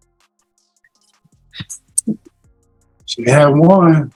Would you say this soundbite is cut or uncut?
uncut